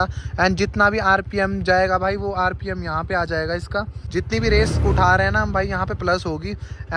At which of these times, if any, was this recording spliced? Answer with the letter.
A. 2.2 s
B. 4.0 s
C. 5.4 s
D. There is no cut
B